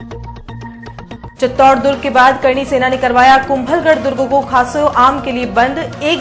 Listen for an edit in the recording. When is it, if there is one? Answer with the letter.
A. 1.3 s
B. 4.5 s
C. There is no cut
C